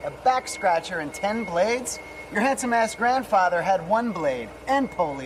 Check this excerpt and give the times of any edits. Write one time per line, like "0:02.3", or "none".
none